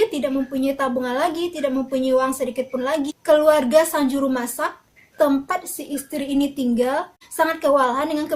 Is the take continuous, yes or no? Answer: no